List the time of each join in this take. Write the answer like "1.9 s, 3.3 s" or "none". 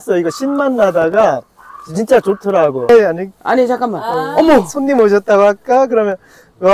2.9 s